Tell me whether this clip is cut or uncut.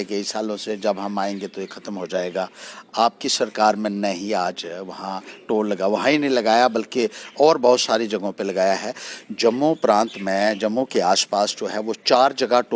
uncut